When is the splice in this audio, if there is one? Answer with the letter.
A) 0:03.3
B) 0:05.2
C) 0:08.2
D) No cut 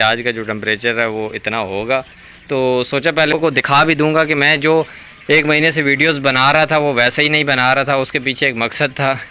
A